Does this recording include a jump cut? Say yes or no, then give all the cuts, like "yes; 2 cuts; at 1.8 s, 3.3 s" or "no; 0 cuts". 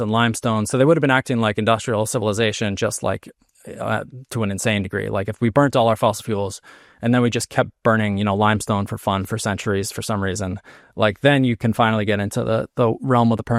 no; 0 cuts